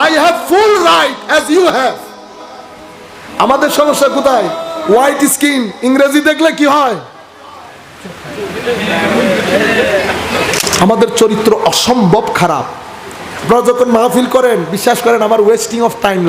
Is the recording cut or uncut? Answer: cut